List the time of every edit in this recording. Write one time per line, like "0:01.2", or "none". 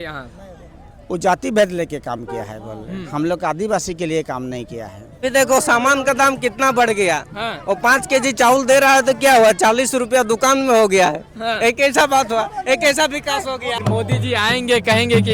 0:05.2
0:13.8